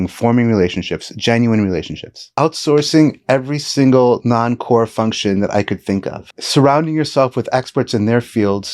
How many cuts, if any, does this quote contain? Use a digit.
2